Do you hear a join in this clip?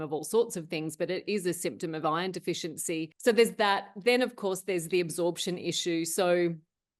yes; 1 cut; at 3.1 s

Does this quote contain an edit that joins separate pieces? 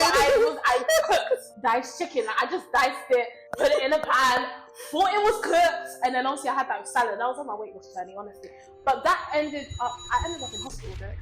yes; 2 cuts; at 1.5 s, 3.4 s

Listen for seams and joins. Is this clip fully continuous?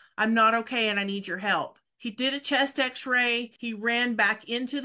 no; 2 cuts; at 1.8 s, 3.5 s

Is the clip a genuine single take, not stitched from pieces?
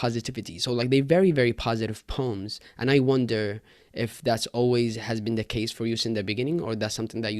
yes; 0 cuts

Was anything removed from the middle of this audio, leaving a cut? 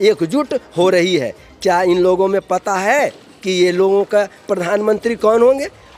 no; 0 cuts

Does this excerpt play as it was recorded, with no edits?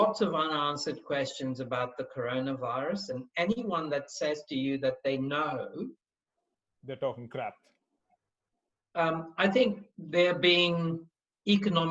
yes; 0 cuts

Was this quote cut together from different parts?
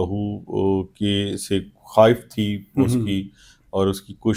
no; 0 cuts

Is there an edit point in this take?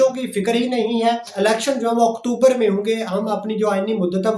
yes; 1 cut; at 1.3 s

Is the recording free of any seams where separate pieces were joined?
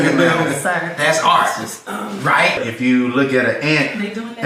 no; 1 cut; at 2.6 s

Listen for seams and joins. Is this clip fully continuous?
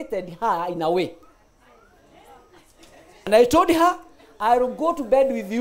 no; 1 cut; at 3.2 s

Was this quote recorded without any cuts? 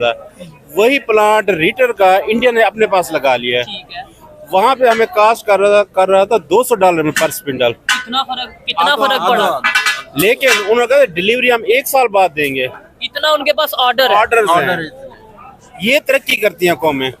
yes; 0 cuts

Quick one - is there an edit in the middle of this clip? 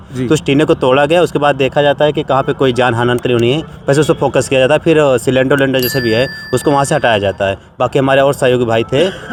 no; 0 cuts

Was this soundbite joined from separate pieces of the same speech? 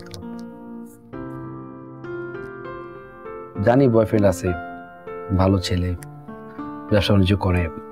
no; 0 cuts

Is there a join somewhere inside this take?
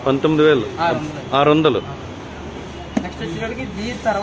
no; 0 cuts

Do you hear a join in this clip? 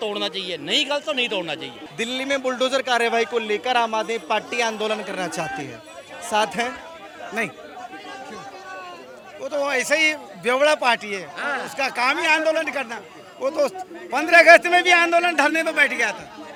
no; 0 cuts

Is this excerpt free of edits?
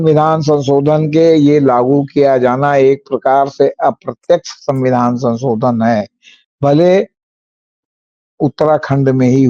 yes; 0 cuts

